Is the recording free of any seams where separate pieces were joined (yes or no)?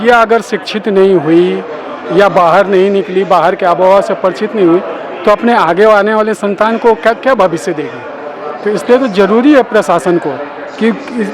yes